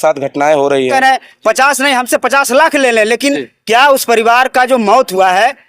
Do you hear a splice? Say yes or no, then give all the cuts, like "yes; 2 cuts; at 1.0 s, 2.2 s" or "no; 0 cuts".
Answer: yes; 1 cut; at 0.9 s